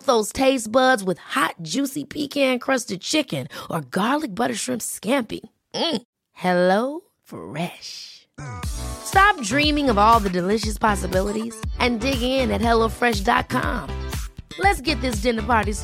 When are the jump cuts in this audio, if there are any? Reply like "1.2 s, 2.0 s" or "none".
none